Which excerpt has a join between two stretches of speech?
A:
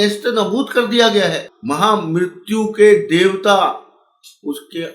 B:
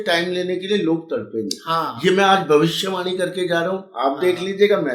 A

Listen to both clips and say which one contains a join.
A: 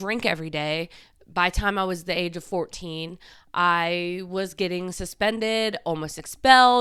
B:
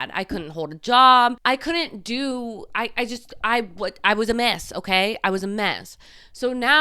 B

